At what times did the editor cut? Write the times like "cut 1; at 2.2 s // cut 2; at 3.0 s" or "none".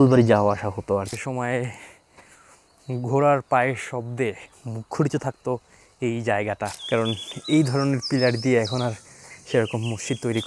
cut 1; at 1.1 s // cut 2; at 6.8 s